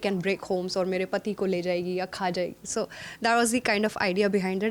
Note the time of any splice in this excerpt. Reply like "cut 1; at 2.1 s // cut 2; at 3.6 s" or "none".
none